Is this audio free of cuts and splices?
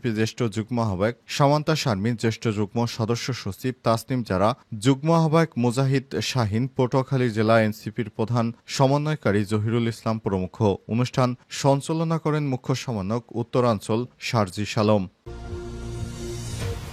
no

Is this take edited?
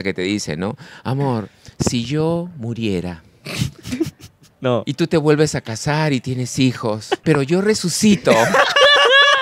no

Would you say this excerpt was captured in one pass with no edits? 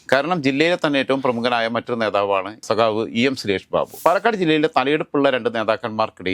no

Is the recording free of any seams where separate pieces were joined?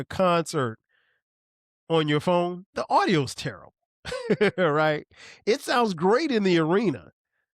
no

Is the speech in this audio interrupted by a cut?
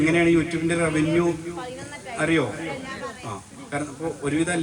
no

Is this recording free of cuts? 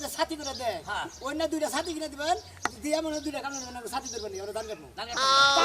yes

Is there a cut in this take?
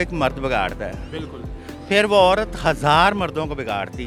no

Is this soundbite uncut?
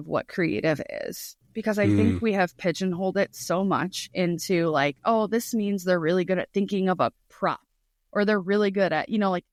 yes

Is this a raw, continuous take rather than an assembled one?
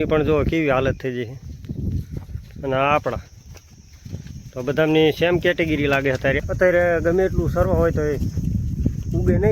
no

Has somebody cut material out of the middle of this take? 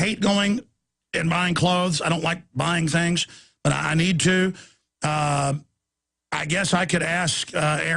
yes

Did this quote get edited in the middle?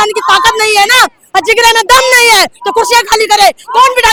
no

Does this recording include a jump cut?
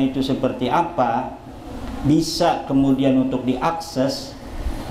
no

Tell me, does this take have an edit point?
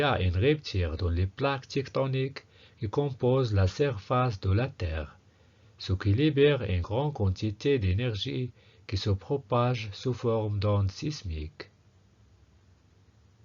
yes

